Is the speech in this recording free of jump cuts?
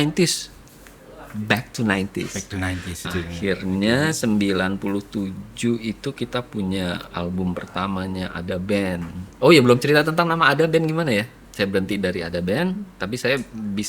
no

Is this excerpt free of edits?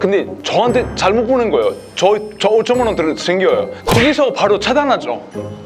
no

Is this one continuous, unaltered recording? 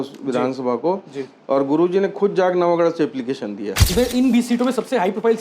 no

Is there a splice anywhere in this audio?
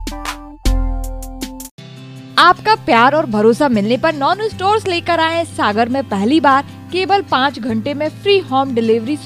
no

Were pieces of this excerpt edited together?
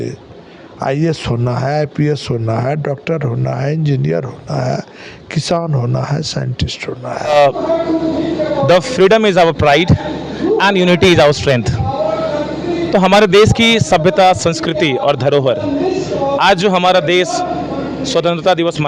yes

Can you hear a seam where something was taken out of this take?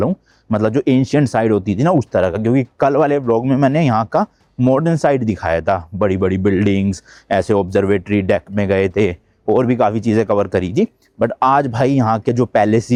no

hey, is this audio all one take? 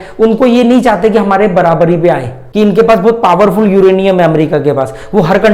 no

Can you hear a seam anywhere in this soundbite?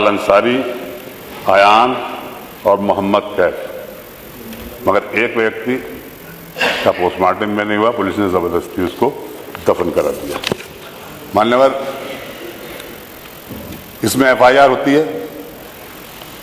no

